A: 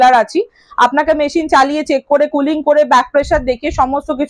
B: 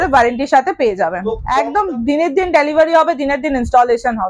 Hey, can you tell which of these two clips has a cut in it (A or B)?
B